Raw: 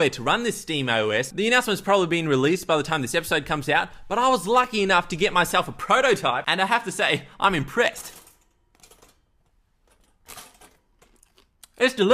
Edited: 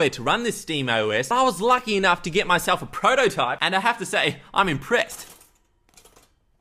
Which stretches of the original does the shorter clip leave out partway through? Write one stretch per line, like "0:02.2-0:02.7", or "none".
0:01.3-0:04.1